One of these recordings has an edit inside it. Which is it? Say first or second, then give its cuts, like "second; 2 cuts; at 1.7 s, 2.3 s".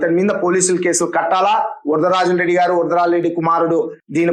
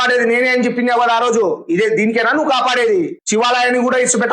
second; 1 cut; at 3.2 s